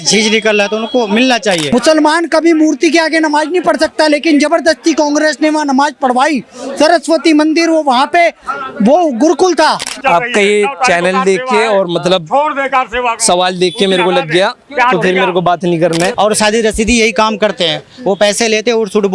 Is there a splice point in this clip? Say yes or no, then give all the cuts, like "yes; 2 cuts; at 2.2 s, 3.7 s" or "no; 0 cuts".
yes; 3 cuts; at 1.7 s, 10.0 s, 16.1 s